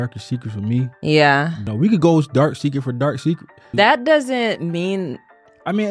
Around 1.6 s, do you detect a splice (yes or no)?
yes